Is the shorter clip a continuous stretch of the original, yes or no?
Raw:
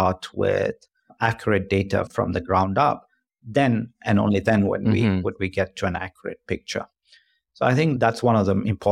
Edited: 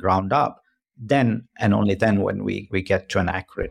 no